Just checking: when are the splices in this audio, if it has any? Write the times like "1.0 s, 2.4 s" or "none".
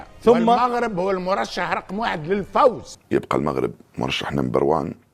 2.9 s